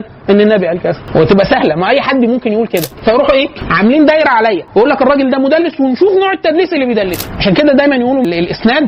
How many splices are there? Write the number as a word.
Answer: two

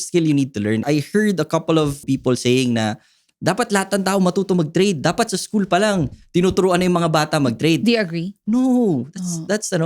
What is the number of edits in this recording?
two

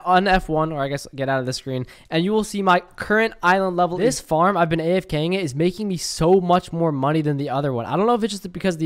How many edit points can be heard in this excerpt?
one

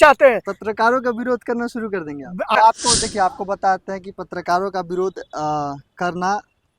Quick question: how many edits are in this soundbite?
one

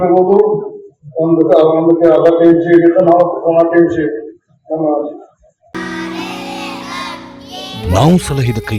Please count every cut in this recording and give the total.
zero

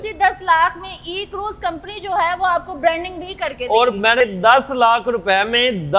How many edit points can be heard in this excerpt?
one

